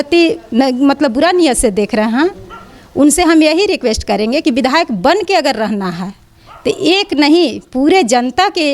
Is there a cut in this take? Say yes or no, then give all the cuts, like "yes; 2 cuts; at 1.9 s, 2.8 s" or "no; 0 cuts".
no; 0 cuts